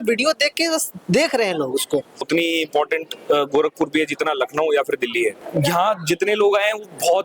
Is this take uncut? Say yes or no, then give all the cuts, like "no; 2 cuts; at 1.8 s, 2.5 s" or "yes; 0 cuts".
no; 2 cuts; at 2.2 s, 5.4 s